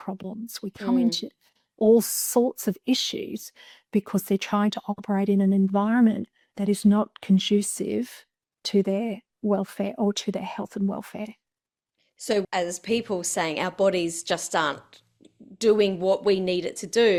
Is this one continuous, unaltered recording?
yes; 0 cuts

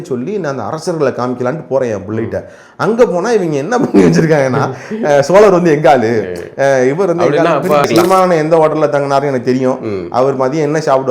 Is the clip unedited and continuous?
no; 1 cut; at 7.9 s

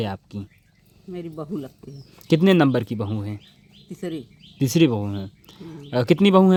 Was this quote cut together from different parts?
no; 0 cuts

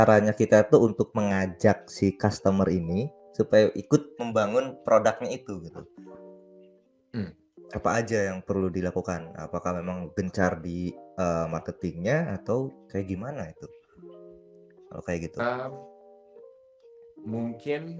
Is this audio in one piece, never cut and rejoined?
yes; 0 cuts

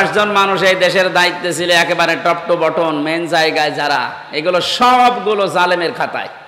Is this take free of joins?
yes; 0 cuts

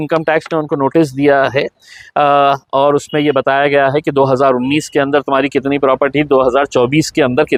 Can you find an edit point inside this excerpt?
no; 0 cuts

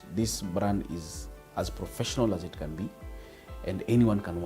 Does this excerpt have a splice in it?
no; 0 cuts

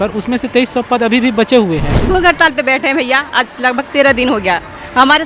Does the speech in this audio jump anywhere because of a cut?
yes; 1 cut; at 1.9 s

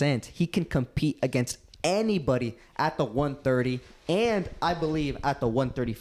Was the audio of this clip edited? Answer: no; 0 cuts

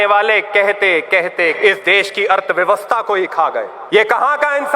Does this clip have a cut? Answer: yes; 2 cuts; at 1.6 s, 3.8 s

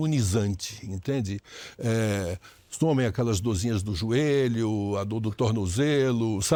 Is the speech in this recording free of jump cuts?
yes; 0 cuts

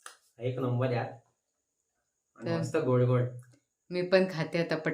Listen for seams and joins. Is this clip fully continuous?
yes; 0 cuts

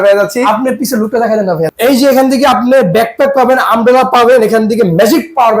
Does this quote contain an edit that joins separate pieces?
yes; 1 cut; at 1.7 s

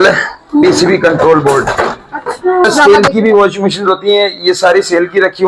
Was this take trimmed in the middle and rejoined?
yes; 1 cut; at 2.6 s

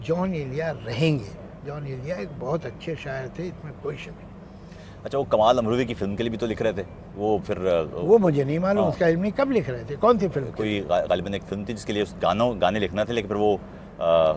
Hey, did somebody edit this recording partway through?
no; 0 cuts

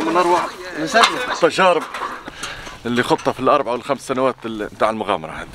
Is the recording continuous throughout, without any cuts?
yes; 0 cuts

